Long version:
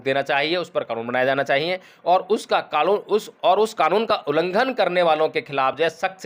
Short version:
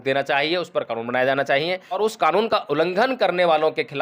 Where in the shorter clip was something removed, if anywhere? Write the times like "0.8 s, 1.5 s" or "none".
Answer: 2.0 s